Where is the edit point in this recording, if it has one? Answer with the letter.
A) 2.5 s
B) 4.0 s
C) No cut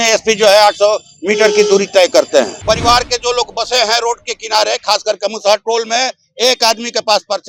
A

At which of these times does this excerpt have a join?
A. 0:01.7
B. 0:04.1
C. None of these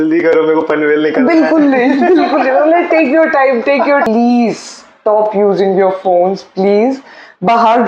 B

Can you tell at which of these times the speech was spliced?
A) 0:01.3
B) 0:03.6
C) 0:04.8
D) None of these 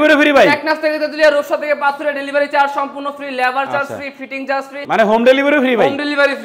C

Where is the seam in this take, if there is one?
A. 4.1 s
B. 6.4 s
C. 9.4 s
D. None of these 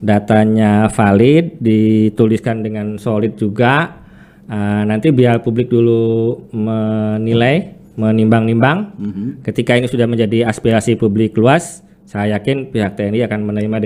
D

